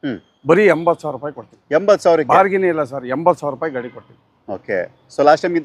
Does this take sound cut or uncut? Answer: uncut